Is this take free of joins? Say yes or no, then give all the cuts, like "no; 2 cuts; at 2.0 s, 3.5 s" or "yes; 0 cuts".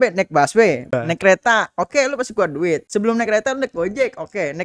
no; 2 cuts; at 0.9 s, 2.9 s